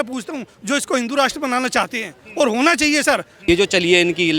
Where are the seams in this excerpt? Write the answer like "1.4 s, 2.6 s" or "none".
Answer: 3.3 s